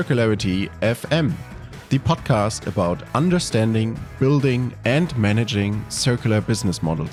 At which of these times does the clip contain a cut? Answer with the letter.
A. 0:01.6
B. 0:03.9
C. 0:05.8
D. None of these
D